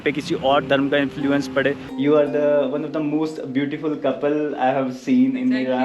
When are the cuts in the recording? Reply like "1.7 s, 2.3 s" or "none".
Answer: 1.9 s